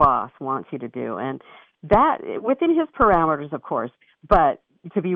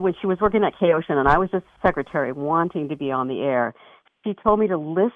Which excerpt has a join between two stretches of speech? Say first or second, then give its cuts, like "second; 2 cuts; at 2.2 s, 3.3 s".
second; 1 cut; at 1.7 s